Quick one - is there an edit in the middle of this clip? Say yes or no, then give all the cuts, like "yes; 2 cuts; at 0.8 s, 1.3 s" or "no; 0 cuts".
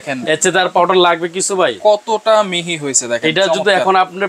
no; 0 cuts